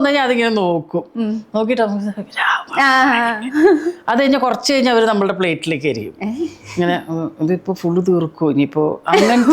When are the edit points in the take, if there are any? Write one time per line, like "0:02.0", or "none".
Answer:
none